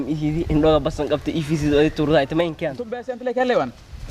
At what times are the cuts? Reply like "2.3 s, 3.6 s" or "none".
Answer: 3.1 s